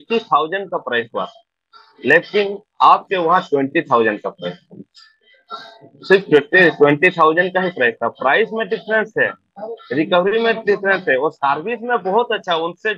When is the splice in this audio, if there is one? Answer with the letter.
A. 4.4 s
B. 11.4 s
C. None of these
C